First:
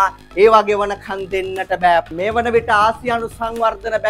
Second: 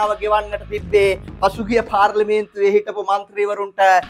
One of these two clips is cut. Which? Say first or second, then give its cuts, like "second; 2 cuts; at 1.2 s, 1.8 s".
first; 1 cut; at 2.1 s